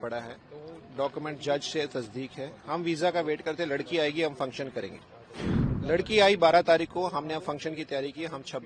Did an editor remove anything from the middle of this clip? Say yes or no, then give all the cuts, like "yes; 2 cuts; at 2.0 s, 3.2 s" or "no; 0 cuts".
no; 0 cuts